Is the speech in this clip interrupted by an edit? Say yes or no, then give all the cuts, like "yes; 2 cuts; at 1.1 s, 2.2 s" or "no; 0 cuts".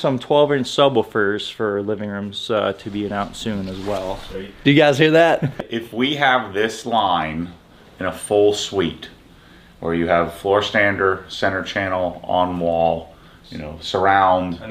yes; 1 cut; at 5.7 s